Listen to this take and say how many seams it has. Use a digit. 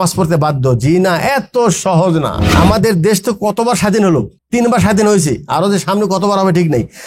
2